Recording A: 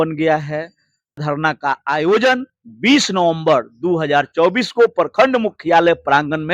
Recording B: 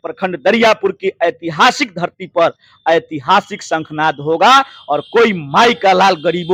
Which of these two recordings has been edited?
A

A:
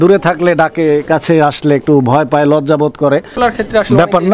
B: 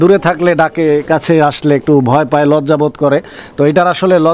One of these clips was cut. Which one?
A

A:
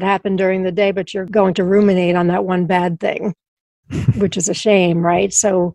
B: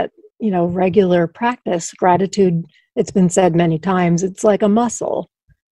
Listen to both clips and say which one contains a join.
A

